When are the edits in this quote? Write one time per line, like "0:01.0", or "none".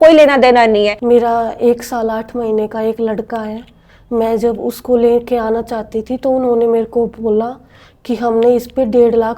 0:01.0